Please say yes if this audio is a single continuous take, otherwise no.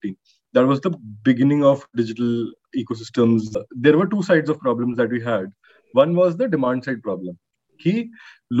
no